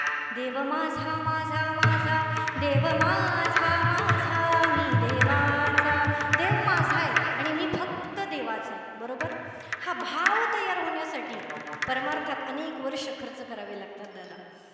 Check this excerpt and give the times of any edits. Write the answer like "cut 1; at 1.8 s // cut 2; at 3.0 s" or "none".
none